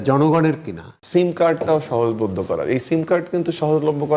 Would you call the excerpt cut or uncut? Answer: cut